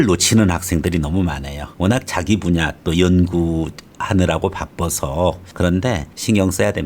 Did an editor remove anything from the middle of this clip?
yes; 1 cut; at 5.4 s

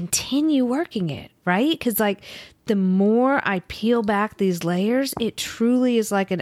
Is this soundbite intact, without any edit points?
yes; 0 cuts

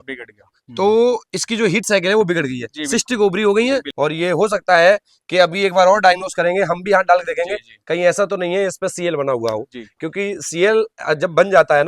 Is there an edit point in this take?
yes; 1 cut; at 3.9 s

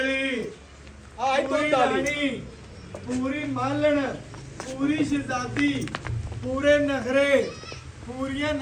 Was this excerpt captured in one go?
yes; 0 cuts

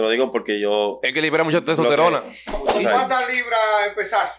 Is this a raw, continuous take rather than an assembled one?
no; 1 cut; at 2.7 s

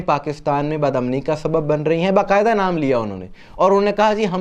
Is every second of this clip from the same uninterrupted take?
yes; 0 cuts

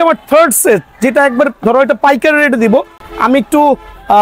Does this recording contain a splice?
no; 0 cuts

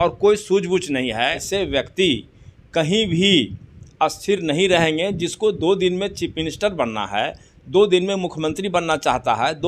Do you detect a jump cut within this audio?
yes; 1 cut; at 1.4 s

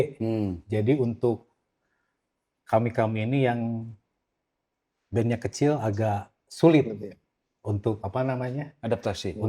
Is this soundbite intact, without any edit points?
yes; 0 cuts

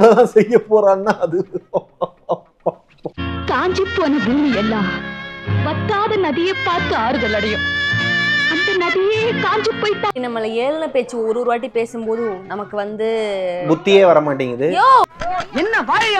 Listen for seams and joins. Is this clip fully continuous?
no; 2 cuts; at 10.2 s, 15.1 s

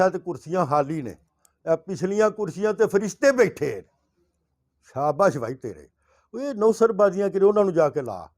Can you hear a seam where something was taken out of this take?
no; 0 cuts

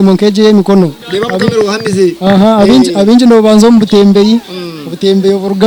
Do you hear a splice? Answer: no; 0 cuts

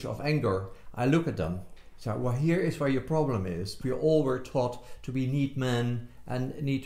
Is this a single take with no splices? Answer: no; 1 cut; at 3.7 s

